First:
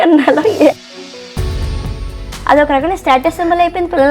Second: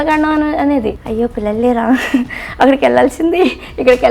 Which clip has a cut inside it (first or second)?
second